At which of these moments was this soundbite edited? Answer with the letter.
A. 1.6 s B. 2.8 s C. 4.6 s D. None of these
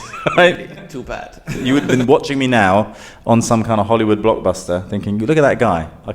A